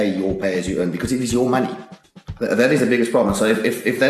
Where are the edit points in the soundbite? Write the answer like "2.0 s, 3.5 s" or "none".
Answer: none